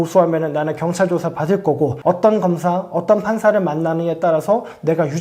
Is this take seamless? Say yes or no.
yes